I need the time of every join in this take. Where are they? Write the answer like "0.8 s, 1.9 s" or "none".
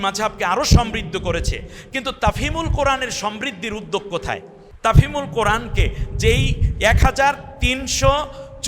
4.6 s